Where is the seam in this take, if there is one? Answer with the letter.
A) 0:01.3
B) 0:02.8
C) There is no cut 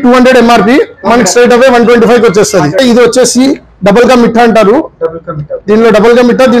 B